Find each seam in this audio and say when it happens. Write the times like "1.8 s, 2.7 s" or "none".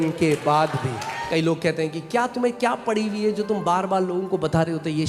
1.2 s